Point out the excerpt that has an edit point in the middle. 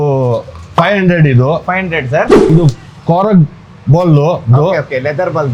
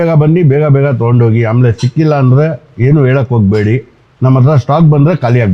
first; 1 cut; at 2.5 s

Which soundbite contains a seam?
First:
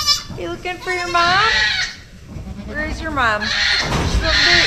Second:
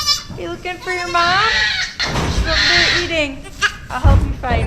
second; 2 cuts; at 1.9 s, 3.8 s

